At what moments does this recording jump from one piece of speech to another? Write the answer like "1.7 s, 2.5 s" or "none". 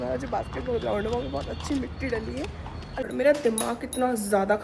2.9 s